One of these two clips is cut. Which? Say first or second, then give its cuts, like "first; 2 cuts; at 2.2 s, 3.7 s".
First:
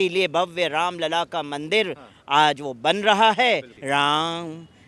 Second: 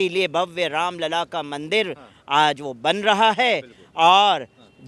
first; 1 cut; at 3.7 s